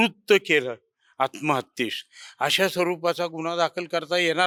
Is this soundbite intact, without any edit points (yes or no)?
yes